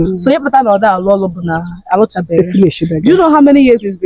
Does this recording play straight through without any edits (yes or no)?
yes